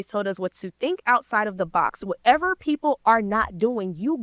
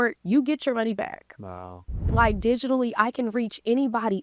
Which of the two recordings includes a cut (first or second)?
second